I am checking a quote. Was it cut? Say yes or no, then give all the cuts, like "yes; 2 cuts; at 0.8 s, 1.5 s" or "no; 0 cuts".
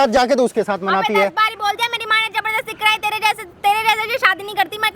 no; 0 cuts